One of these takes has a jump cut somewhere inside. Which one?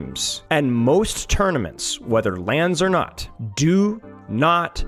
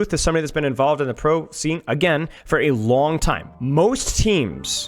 second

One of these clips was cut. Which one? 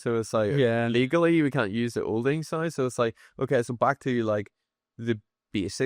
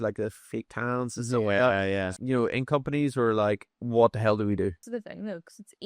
second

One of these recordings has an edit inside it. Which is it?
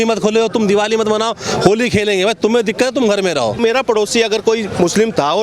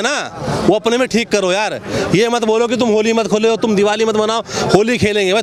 first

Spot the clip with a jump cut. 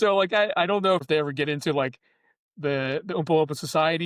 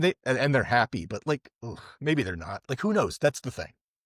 first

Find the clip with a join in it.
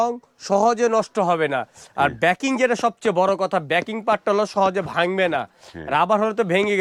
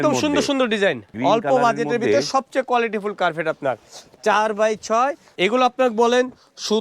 second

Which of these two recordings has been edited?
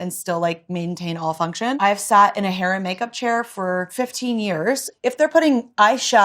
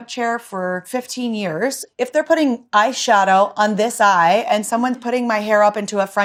first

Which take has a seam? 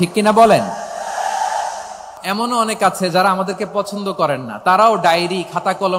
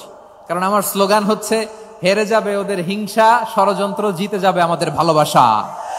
first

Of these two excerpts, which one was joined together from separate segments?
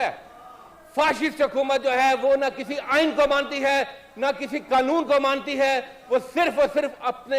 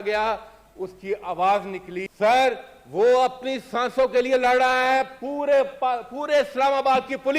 second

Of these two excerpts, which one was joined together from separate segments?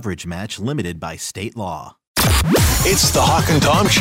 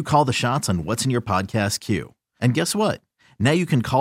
first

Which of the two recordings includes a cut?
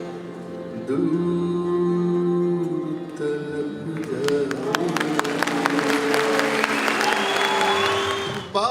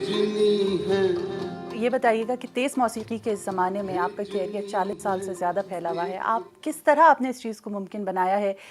second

